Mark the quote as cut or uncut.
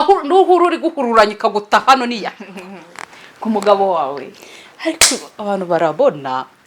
uncut